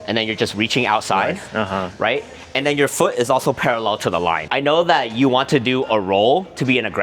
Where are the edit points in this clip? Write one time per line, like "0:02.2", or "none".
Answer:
0:04.5